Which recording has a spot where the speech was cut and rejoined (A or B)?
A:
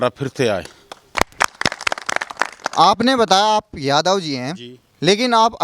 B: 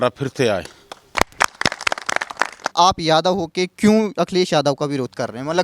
B